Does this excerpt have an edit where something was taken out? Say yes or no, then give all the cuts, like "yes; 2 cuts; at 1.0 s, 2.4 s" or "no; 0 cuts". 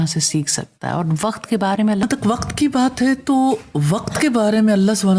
yes; 1 cut; at 2.0 s